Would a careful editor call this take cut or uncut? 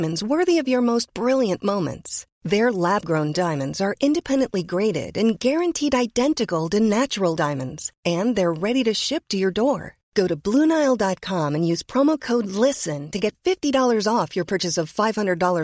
uncut